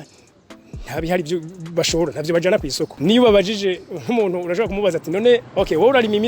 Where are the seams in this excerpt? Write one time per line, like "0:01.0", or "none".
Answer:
0:02.9
0:05.5